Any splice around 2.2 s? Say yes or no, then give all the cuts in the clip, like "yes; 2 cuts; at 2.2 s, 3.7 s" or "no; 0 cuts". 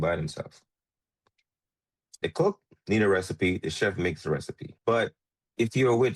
yes; 1 cut; at 2.2 s